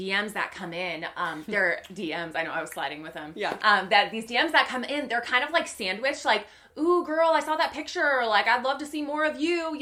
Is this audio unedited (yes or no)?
yes